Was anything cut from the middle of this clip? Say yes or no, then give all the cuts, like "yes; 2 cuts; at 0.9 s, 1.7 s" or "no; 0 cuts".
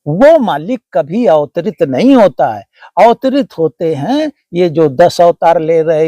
no; 0 cuts